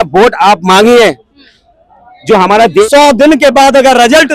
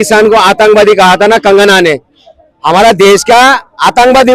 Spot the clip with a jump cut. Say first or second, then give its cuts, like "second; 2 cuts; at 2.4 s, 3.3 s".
first; 1 cut; at 2.9 s